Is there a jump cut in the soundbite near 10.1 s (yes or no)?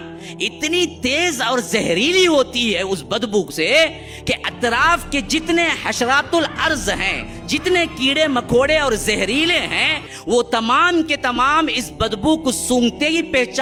no